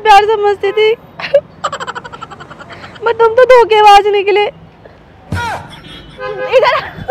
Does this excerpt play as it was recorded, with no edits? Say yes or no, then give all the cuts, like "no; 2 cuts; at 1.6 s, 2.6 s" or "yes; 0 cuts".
yes; 0 cuts